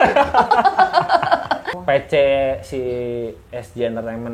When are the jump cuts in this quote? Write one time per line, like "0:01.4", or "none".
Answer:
0:01.7